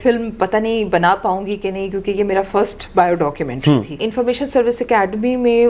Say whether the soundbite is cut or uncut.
cut